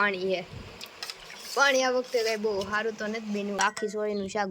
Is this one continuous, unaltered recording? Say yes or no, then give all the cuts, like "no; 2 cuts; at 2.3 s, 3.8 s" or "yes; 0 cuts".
no; 1 cut; at 3.6 s